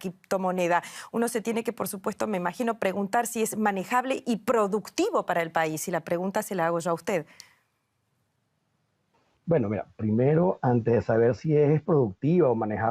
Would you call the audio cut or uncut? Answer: cut